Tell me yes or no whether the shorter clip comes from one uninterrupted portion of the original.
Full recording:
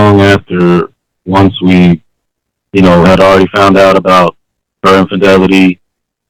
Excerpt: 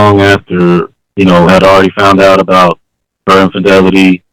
no